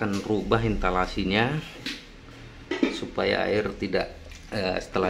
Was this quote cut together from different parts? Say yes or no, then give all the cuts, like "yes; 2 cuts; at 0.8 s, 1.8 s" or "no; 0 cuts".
no; 0 cuts